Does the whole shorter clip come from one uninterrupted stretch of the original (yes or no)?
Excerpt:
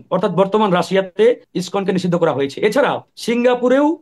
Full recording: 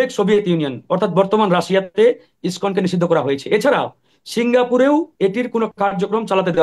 no